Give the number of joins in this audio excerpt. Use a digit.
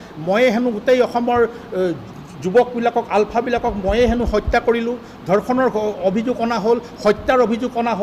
0